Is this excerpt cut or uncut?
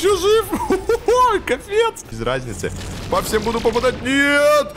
cut